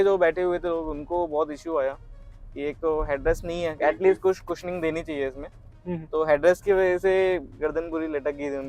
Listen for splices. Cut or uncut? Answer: uncut